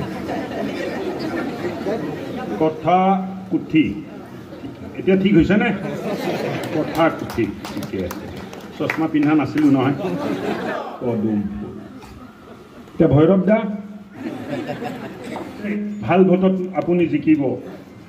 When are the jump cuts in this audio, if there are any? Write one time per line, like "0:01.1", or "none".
0:10.7
0:14.2
0:15.7